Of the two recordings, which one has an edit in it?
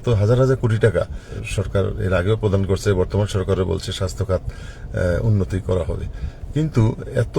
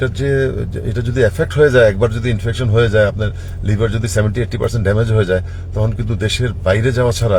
first; 1 cut; at 1.4 s

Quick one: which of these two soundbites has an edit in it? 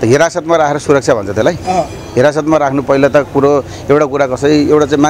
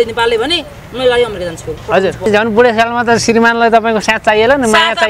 second; 1 cut; at 2.3 s

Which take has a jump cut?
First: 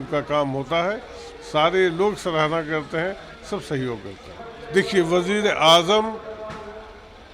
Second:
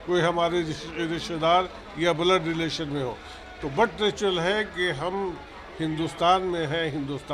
first; 1 cut; at 4.5 s

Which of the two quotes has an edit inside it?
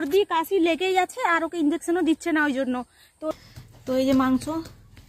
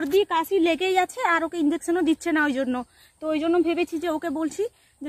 first; 1 cut; at 3.3 s

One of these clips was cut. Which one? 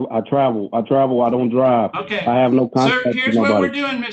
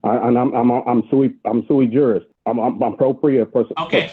second; 1 cut; at 2.3 s

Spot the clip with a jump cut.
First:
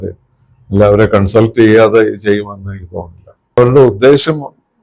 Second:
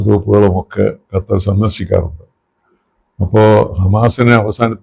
first; 1 cut; at 3.6 s

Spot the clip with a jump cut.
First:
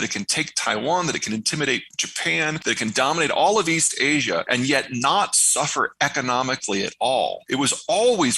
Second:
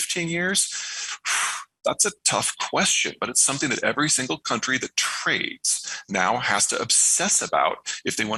first; 3 cuts; at 2.5 s, 4.5 s, 7.4 s

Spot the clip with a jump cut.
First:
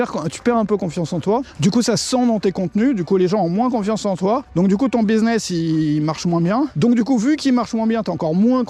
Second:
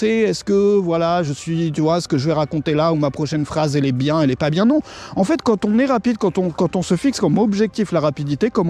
first; 3 cuts; at 1.5 s, 4.5 s, 6.7 s

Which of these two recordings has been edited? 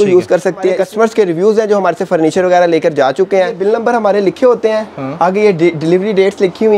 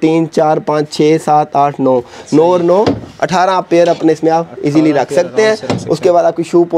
first; 2 cuts; at 0.8 s, 3.6 s

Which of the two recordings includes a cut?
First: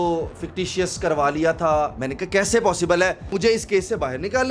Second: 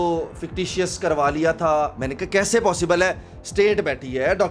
first; 1 cut; at 3.3 s

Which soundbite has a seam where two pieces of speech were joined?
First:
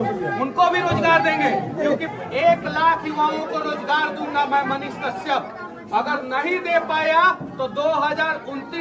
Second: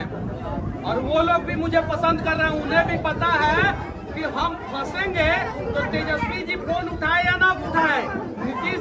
first; 1 cut; at 2.4 s

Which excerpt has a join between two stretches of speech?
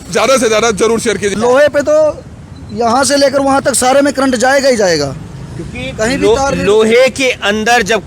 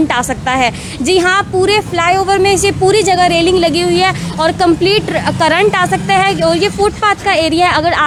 first; 1 cut; at 1.3 s

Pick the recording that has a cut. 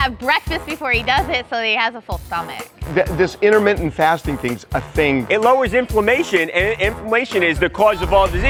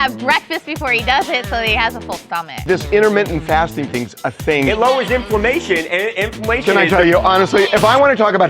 second; 3 cuts; at 2.6 s, 4.7 s, 6.6 s

